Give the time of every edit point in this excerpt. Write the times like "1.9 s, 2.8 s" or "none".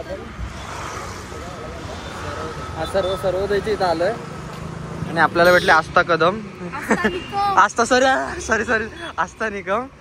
none